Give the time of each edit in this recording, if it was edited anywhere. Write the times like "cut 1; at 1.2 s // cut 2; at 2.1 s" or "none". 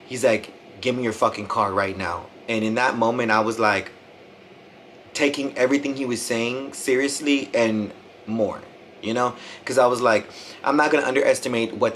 cut 1; at 2.3 s